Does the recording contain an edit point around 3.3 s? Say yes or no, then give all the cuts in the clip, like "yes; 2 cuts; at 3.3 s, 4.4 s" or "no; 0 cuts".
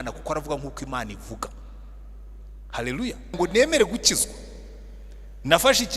yes; 1 cut; at 3.3 s